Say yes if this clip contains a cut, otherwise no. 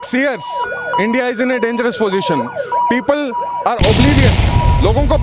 no